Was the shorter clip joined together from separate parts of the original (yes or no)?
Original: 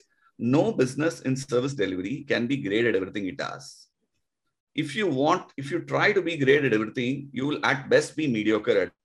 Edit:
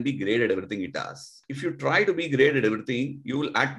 yes